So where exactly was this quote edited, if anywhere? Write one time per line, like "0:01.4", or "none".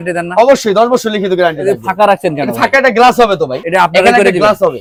none